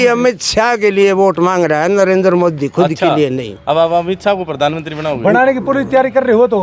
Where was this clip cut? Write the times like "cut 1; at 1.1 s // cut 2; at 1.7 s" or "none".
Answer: none